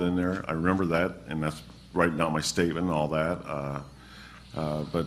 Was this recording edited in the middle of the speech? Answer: yes; 1 cut; at 2.9 s

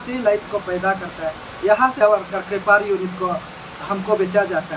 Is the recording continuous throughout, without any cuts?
no; 1 cut; at 1.9 s

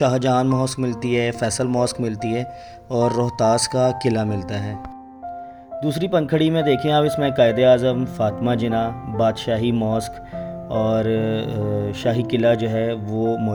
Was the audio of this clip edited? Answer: no; 0 cuts

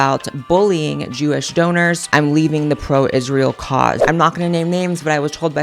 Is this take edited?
yes; 2 cuts; at 2.0 s, 4.0 s

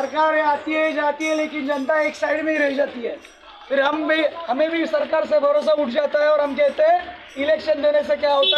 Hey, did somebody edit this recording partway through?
no; 0 cuts

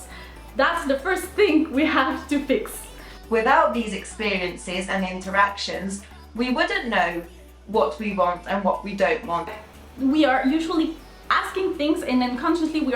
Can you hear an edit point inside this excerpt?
yes; 2 cuts; at 3.1 s, 9.5 s

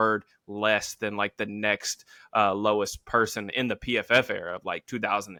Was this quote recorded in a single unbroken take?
yes; 0 cuts

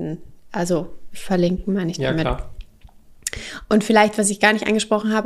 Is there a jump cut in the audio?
no; 0 cuts

